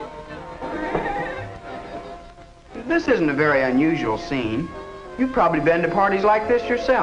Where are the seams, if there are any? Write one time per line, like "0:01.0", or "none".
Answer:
0:01.2